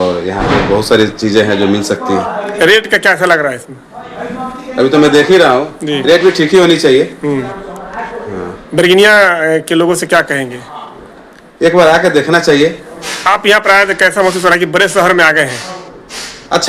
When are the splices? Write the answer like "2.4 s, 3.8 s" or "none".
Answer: none